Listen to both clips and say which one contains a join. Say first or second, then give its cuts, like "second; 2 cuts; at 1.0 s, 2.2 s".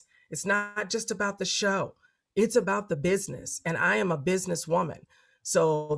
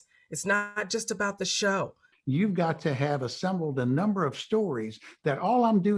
second; 1 cut; at 2.1 s